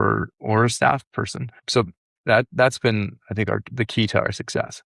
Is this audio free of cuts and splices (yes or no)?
no